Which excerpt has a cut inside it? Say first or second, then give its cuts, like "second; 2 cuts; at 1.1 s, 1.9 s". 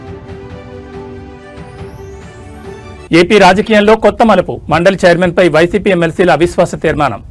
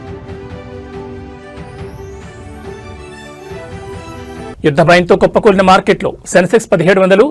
second; 2 cuts; at 3.0 s, 3.9 s